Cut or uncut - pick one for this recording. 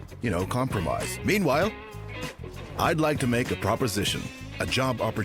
uncut